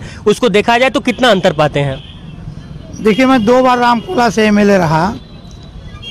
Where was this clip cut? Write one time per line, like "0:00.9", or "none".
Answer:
none